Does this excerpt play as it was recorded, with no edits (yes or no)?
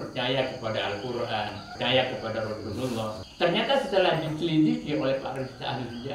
no